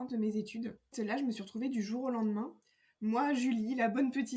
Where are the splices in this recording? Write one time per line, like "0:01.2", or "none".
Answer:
0:00.9